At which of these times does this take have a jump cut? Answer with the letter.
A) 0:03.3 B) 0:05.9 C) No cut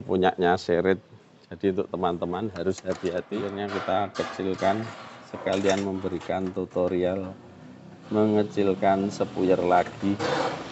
A